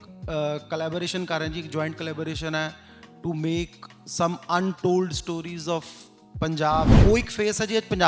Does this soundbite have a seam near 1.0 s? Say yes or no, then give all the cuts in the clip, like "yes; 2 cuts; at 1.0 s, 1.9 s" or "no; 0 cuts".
no; 1 cut; at 7.0 s